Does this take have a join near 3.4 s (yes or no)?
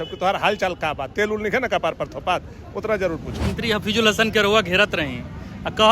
yes